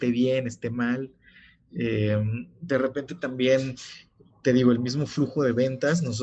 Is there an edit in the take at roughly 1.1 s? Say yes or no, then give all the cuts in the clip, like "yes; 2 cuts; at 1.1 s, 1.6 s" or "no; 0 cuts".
no; 0 cuts